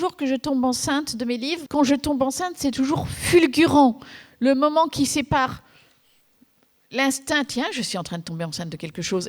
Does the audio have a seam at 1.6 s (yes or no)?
yes